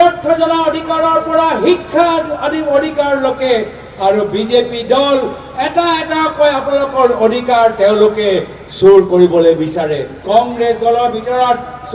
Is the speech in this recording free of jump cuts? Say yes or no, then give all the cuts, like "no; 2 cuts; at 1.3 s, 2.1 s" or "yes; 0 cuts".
no; 1 cut; at 10.1 s